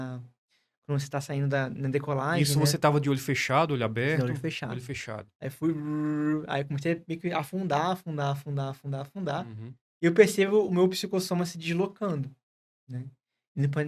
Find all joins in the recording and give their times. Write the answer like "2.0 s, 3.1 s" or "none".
none